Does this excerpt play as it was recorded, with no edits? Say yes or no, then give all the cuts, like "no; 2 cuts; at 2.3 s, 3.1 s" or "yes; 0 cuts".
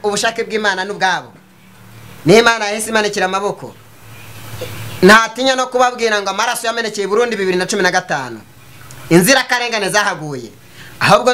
yes; 0 cuts